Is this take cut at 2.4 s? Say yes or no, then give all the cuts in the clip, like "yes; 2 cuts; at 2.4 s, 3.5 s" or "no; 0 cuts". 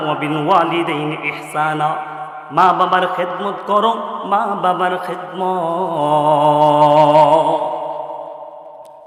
no; 0 cuts